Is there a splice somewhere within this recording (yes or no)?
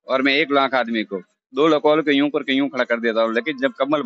no